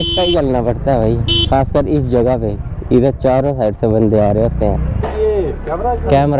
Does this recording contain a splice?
yes; 1 cut; at 5.0 s

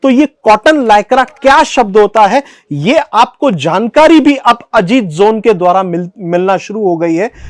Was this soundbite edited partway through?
no; 0 cuts

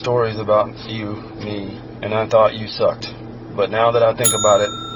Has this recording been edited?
yes; 1 cut; at 1.9 s

